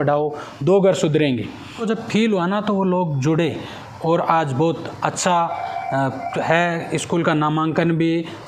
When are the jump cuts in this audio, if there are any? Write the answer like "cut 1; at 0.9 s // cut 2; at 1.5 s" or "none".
cut 1; at 1.8 s